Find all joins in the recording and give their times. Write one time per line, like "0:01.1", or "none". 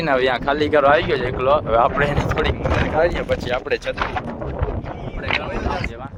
none